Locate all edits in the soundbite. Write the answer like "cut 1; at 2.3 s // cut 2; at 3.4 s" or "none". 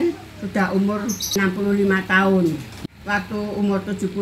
cut 1; at 1.2 s // cut 2; at 2.7 s